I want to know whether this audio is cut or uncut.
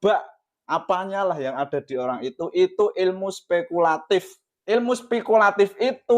cut